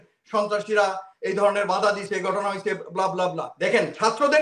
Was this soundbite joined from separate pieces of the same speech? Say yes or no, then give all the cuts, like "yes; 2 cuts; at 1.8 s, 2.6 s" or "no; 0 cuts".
yes; 1 cut; at 3.5 s